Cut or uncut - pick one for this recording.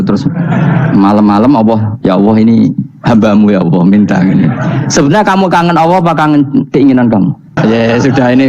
cut